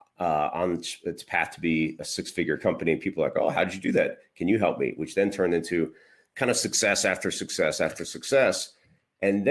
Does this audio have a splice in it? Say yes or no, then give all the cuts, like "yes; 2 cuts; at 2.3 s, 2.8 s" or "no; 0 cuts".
no; 0 cuts